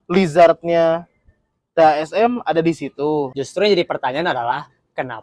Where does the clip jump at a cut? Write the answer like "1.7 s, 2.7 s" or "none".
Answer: 3.4 s